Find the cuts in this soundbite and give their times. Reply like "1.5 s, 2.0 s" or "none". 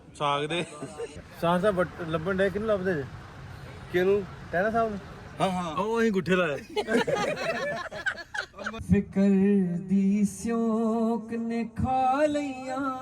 1.1 s, 8.8 s